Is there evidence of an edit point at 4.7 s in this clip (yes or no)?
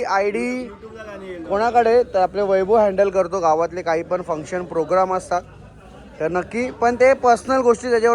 no